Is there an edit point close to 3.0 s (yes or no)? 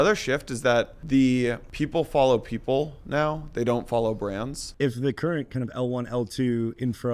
no